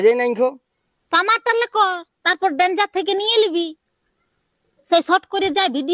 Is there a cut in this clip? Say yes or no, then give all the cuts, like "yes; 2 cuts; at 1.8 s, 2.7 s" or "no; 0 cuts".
no; 0 cuts